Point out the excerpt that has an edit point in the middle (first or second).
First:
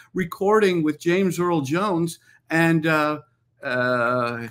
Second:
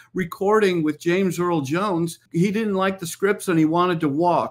second